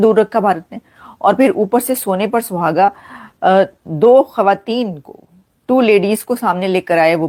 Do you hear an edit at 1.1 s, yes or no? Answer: no